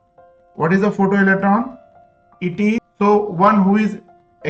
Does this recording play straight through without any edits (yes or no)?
no